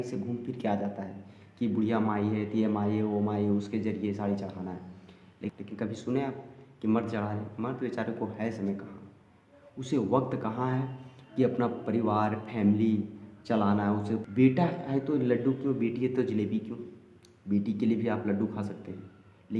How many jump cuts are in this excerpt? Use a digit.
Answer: 2